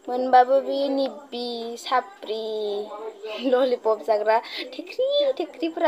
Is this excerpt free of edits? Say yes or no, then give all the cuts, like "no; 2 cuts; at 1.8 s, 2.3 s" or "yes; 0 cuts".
yes; 0 cuts